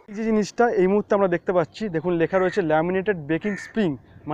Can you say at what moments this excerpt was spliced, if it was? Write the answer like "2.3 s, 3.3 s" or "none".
none